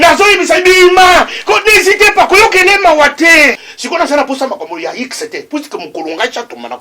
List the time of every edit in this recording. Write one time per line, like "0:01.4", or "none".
0:03.7